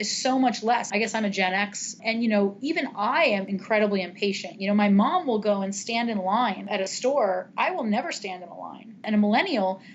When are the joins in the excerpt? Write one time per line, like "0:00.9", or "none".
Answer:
0:00.9
0:02.0
0:03.5
0:06.7
0:09.0